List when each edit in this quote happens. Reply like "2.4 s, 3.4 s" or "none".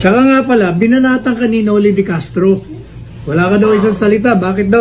1.2 s